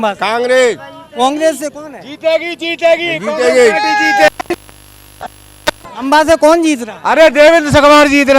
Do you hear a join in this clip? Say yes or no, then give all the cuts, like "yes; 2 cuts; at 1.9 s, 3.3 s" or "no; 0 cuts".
no; 0 cuts